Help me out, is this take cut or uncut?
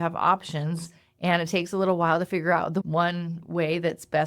cut